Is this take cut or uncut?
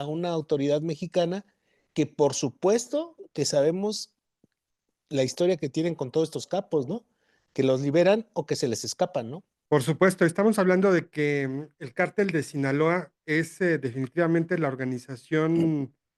uncut